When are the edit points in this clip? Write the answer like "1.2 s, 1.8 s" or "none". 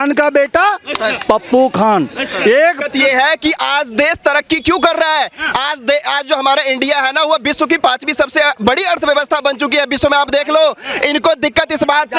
2.9 s